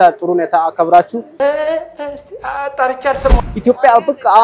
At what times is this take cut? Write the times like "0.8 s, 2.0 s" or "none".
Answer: 3.4 s